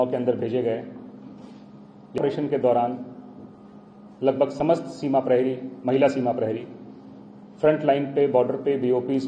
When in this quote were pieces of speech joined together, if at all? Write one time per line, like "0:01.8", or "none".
0:02.2